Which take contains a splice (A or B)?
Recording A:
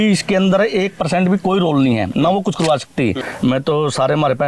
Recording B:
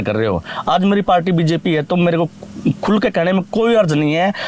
A